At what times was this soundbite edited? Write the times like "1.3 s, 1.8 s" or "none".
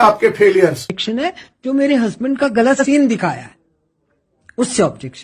1.0 s